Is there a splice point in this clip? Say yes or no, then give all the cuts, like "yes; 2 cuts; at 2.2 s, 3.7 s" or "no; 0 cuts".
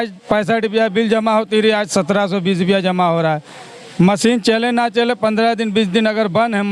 no; 0 cuts